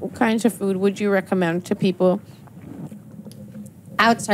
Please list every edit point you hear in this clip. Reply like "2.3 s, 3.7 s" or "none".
none